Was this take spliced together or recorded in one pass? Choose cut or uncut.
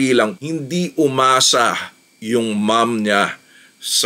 uncut